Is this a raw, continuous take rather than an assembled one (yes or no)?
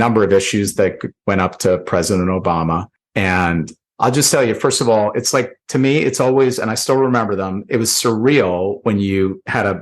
no